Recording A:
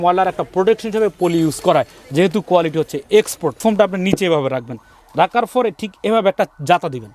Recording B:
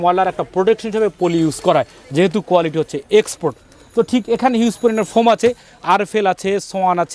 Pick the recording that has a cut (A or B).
A